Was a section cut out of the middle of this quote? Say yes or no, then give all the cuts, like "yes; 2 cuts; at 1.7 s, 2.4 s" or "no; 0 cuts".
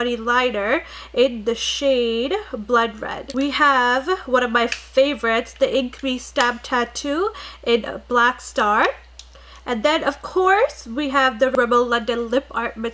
no; 0 cuts